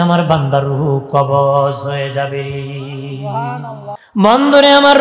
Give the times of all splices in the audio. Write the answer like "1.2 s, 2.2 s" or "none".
3.9 s